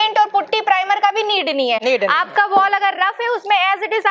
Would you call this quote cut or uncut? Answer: uncut